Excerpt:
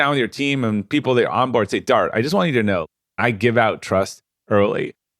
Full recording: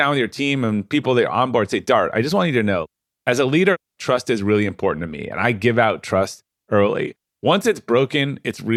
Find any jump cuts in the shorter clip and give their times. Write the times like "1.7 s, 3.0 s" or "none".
3.0 s